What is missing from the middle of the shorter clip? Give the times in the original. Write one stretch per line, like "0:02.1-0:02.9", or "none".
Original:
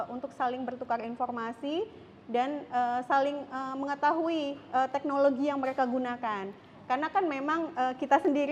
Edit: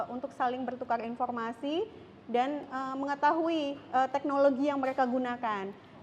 0:02.6-0:03.4